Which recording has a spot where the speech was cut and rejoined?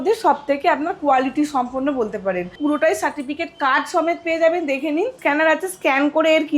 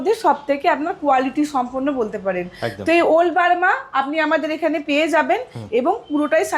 first; 2 cuts; at 2.5 s, 5.2 s

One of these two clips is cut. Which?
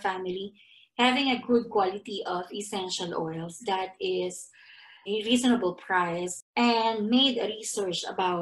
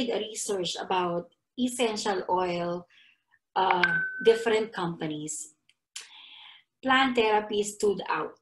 first; 2 cuts; at 5.0 s, 6.3 s

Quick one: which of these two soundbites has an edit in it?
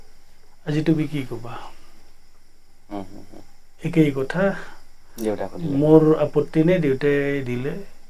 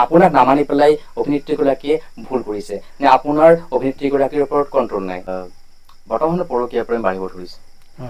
second; 1 cut; at 5.3 s

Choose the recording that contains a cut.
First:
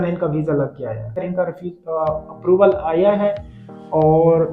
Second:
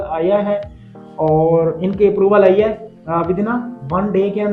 first; 1 cut; at 1.2 s

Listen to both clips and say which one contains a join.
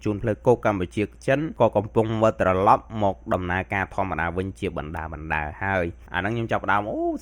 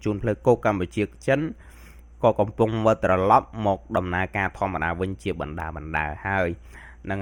first; 2 cuts; at 1.5 s, 6.0 s

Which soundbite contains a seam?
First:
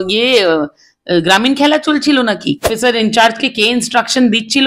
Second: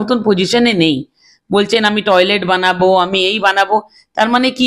first; 1 cut; at 2.7 s

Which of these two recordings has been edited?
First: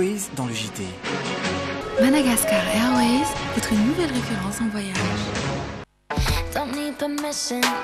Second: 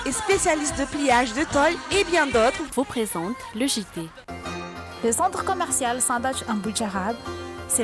first; 1 cut; at 6.0 s

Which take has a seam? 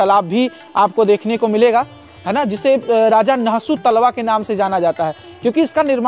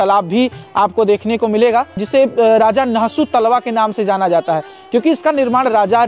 second; 1 cut; at 2.0 s

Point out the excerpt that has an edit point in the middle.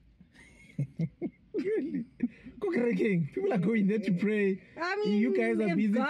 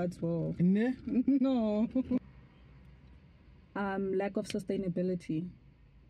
second; 1 cut; at 2.2 s

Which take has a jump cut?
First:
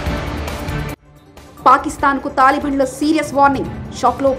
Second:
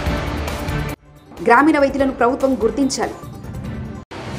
first; 1 cut; at 1.1 s

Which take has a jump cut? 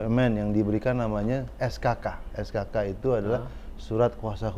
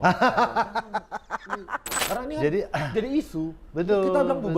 second; 1 cut; at 2.0 s

